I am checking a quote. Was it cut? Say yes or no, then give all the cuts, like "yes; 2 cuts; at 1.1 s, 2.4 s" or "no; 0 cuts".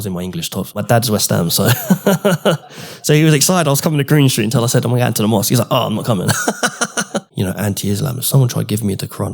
yes; 2 cuts; at 0.8 s, 7.3 s